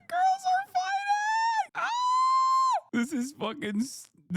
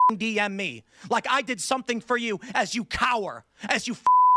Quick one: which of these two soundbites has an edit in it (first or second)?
first